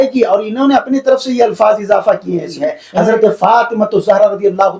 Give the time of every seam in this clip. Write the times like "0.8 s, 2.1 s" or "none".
2.8 s